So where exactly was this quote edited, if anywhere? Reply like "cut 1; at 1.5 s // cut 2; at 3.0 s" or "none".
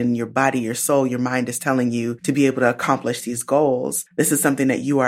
cut 1; at 2.2 s // cut 2; at 4.0 s